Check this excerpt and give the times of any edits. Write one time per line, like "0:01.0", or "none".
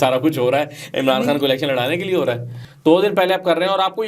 0:02.5